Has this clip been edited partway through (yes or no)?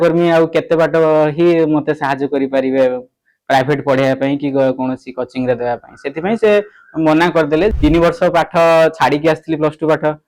yes